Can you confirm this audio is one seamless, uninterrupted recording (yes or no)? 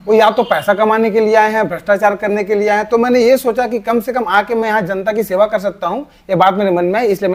yes